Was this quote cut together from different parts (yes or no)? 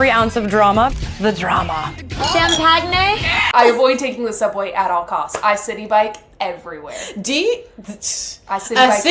yes